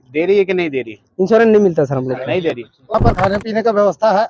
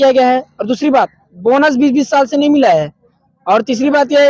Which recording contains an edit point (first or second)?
first